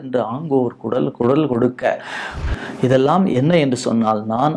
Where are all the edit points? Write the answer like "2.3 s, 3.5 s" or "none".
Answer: 2.3 s